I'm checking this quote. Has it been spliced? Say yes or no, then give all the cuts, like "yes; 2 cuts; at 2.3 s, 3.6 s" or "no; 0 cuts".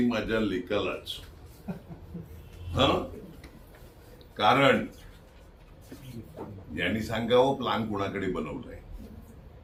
no; 0 cuts